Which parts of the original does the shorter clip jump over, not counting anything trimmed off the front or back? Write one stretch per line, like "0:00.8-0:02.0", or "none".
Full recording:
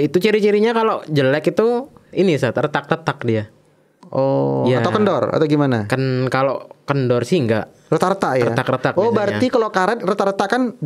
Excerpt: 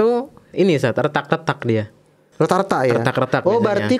0:03.8-0:07.7